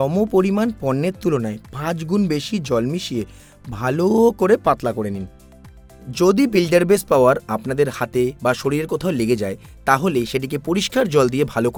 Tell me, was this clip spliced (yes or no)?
no